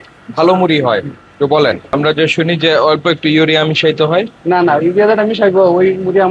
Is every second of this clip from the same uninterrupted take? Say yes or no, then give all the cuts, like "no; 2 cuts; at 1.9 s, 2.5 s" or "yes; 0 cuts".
no; 1 cut; at 1.9 s